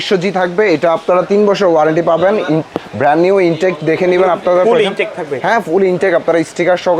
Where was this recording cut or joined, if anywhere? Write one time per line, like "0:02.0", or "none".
none

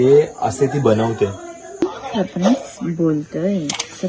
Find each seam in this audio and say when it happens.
0:01.8

